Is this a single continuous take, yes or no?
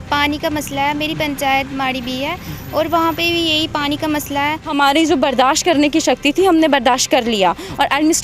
no